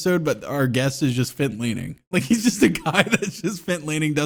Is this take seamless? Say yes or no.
yes